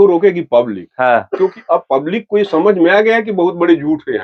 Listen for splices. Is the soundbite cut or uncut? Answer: uncut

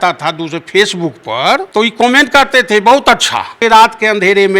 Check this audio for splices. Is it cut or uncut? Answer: cut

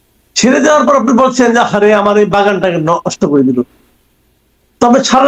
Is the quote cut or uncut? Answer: uncut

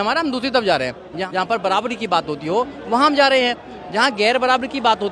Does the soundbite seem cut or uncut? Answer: cut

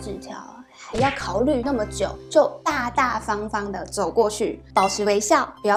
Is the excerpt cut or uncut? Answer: uncut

